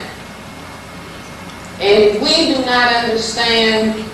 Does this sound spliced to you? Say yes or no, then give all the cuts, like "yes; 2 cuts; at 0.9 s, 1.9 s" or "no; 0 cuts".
yes; 1 cut; at 1.1 s